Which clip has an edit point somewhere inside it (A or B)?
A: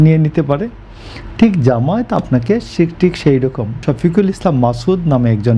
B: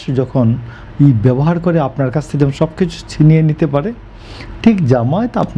A